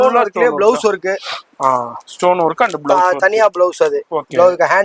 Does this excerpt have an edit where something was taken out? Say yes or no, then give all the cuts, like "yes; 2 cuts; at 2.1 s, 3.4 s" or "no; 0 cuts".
no; 0 cuts